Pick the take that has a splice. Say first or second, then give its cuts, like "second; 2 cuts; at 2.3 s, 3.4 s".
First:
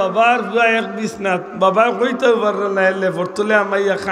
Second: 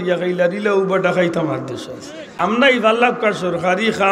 second; 1 cut; at 2.3 s